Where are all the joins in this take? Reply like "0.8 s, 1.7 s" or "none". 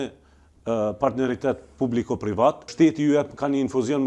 2.7 s